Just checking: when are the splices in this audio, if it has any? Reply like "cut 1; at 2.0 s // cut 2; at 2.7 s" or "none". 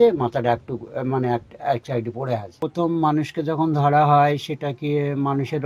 cut 1; at 2.5 s